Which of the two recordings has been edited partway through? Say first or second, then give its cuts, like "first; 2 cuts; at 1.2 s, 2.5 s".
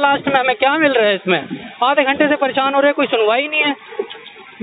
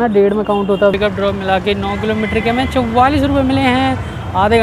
second; 1 cut; at 0.9 s